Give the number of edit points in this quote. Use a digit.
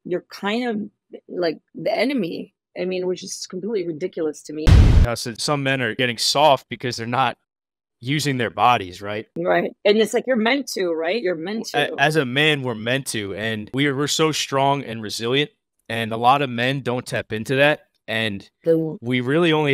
1